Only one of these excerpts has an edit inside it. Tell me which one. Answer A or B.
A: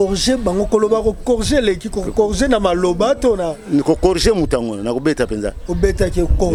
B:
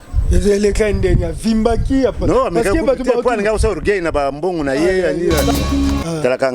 B